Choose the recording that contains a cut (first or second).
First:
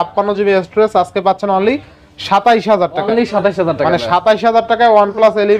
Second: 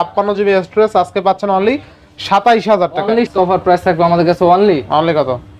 second